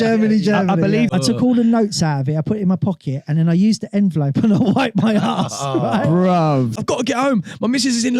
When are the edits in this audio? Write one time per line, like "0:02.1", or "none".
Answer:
0:01.1
0:06.8